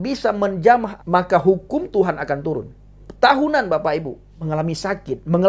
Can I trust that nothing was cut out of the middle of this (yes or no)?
no